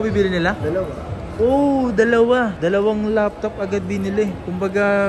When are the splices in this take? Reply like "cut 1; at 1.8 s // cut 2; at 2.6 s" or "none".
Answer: none